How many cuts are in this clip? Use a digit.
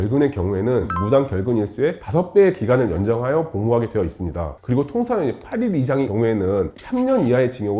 4